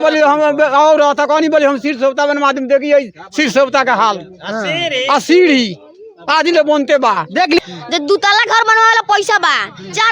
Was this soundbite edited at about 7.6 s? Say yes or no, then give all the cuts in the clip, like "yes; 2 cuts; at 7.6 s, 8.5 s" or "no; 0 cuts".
yes; 1 cut; at 7.6 s